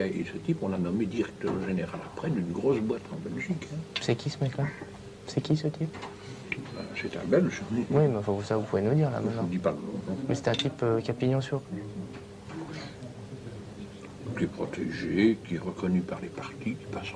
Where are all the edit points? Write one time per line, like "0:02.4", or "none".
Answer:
0:02.0